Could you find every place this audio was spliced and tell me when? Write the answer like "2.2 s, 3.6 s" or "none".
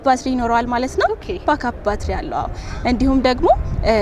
none

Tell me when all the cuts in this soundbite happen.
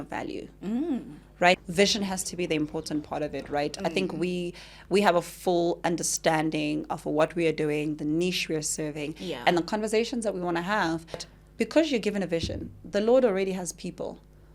1.6 s, 11.3 s

